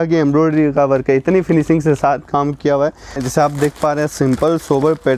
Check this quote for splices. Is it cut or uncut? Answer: cut